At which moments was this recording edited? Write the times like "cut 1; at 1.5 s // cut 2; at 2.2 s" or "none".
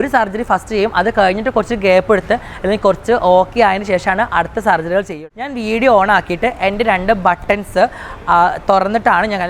cut 1; at 5.1 s